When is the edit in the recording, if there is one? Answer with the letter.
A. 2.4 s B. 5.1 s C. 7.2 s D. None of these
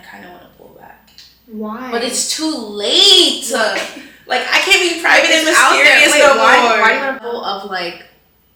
C